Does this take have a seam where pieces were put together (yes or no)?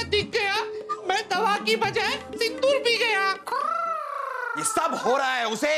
yes